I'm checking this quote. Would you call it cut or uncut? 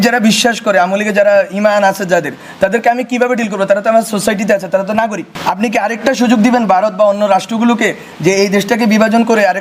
cut